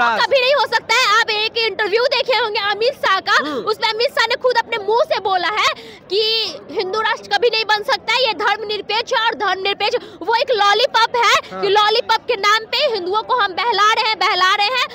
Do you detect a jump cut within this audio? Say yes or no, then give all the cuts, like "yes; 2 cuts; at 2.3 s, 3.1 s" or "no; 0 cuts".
no; 0 cuts